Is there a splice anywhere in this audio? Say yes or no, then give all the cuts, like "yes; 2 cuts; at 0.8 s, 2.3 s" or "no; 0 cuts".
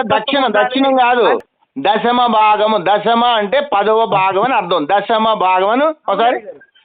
yes; 1 cut; at 1.4 s